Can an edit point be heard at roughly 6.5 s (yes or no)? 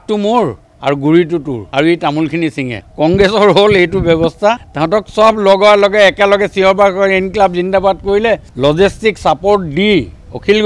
no